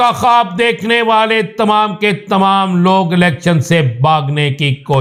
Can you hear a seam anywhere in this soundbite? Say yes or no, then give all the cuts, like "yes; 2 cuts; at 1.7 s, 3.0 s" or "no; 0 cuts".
no; 0 cuts